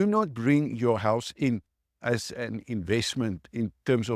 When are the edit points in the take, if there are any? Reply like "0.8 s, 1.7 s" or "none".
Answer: none